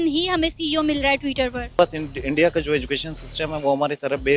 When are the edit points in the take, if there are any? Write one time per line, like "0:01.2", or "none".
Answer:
0:01.8